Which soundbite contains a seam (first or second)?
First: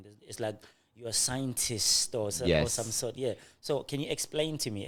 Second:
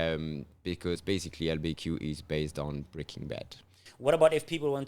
second